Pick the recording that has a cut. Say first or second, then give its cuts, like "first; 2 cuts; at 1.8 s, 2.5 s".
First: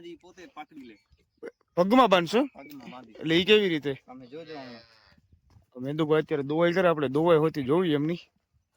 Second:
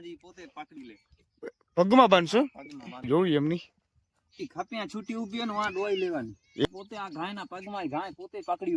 second; 2 cuts; at 3.0 s, 6.7 s